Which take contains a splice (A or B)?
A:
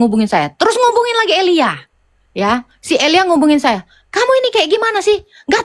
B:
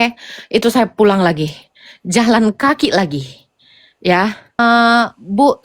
B